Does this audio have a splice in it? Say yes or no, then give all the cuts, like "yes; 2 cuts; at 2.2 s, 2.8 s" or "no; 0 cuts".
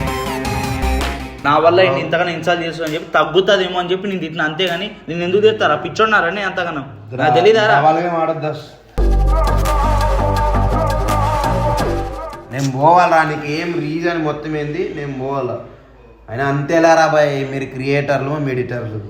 yes; 2 cuts; at 1.3 s, 12.3 s